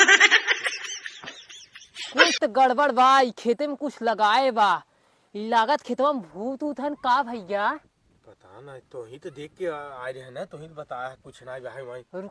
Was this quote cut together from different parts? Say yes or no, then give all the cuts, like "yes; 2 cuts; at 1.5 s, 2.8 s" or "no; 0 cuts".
yes; 1 cut; at 2.3 s